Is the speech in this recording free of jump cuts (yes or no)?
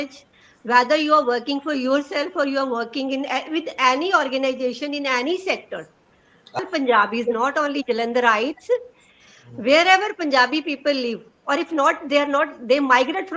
no